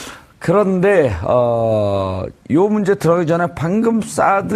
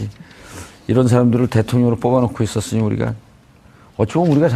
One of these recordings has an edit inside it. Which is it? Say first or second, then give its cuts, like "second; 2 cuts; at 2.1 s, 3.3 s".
second; 1 cut; at 2.3 s